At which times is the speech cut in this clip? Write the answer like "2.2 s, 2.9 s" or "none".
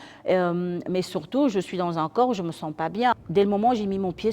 3.1 s